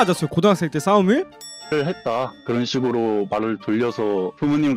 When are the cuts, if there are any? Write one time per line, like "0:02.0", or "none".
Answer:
0:01.4